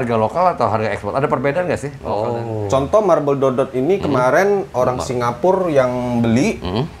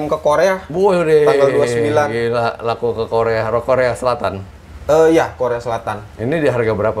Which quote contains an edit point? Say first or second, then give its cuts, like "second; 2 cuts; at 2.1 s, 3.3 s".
first; 1 cut; at 2.0 s